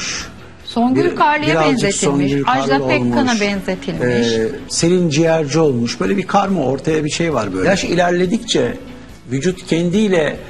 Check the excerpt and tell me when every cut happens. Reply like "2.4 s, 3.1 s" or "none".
7.6 s